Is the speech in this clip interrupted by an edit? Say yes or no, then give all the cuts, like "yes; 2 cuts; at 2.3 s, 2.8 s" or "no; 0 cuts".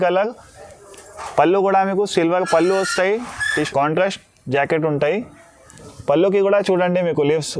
yes; 1 cut; at 3.4 s